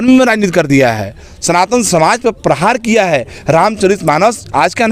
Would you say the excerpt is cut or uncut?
uncut